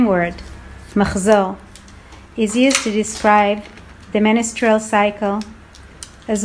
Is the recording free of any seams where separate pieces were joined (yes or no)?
yes